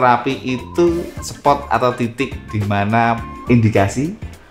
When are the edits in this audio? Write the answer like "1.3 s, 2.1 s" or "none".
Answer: 3.3 s